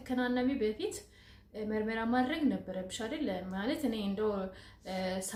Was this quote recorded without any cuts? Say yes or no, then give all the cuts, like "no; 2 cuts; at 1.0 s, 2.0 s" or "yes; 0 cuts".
yes; 0 cuts